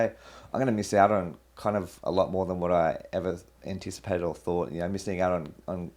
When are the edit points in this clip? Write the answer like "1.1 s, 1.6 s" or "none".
none